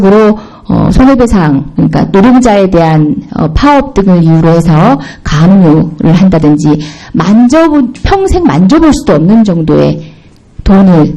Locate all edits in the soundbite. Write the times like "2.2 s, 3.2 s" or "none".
none